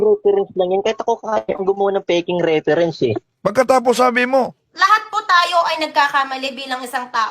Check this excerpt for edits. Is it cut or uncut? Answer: cut